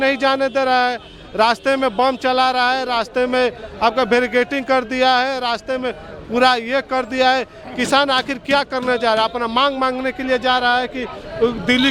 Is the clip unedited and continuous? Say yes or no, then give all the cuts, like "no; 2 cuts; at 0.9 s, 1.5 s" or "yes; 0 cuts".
yes; 0 cuts